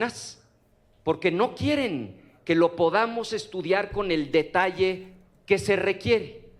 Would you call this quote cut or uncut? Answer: uncut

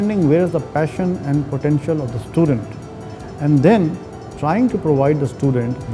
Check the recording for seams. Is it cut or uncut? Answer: uncut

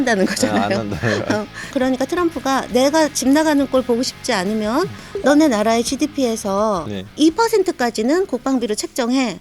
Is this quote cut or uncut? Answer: cut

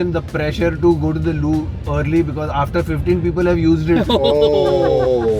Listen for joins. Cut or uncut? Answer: uncut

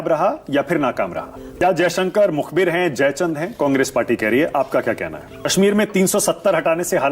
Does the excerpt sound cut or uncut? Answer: cut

